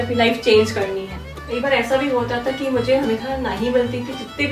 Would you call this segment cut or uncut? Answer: cut